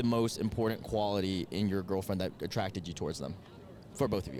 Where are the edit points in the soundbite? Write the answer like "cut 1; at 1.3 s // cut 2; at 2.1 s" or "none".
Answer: none